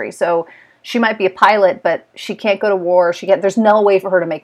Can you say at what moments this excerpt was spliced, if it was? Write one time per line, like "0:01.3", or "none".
none